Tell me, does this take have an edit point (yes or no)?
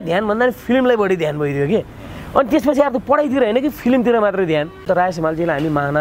yes